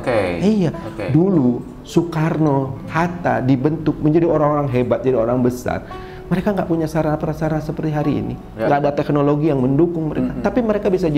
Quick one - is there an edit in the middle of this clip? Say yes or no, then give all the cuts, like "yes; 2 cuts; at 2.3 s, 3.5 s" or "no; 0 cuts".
no; 0 cuts